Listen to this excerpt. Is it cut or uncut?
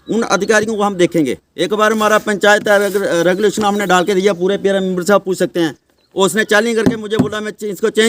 uncut